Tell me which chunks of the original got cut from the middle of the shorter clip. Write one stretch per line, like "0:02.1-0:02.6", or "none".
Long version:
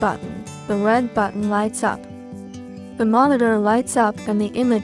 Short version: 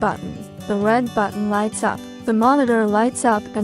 0:02.1-0:02.8